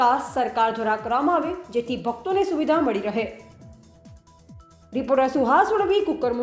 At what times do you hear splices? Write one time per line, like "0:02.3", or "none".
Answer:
0:03.5
0:04.9

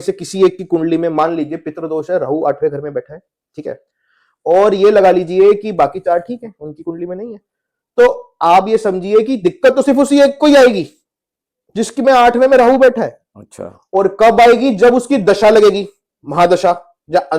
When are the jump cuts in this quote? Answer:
none

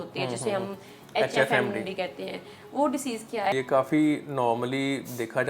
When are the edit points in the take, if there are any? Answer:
0:03.5

